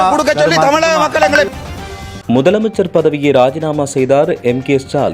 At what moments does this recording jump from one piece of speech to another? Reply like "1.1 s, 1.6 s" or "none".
1.4 s